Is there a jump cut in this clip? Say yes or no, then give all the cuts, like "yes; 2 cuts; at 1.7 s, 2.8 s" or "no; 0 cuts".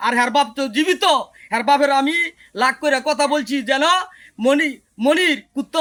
no; 0 cuts